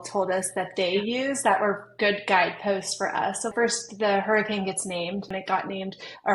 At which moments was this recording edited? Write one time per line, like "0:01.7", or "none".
0:03.5
0:05.3